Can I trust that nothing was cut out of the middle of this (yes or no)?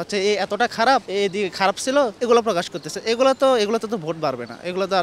no